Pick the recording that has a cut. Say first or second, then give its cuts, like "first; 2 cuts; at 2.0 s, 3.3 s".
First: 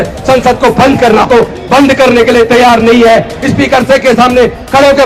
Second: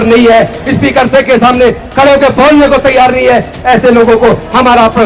first; 1 cut; at 1.3 s